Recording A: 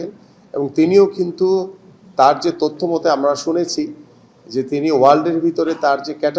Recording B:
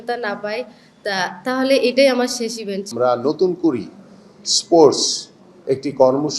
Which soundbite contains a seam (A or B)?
B